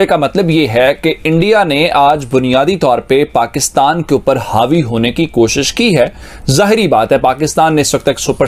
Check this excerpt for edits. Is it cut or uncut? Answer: uncut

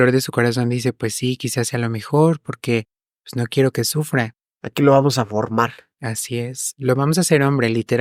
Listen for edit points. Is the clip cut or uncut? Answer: uncut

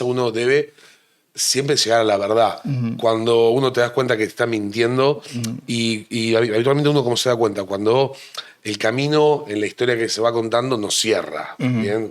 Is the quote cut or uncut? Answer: uncut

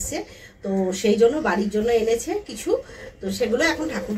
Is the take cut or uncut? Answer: uncut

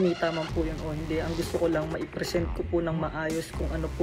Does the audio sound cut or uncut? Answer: uncut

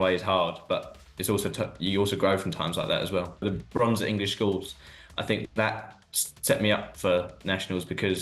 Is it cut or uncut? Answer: cut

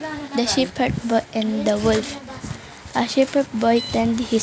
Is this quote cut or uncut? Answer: uncut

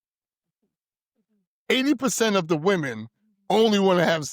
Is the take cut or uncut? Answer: uncut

